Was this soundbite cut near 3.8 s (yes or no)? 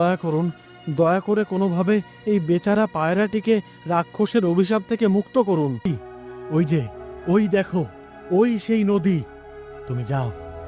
no